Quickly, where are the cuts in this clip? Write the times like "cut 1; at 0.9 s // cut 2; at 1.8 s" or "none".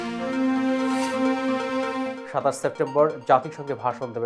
cut 1; at 2.1 s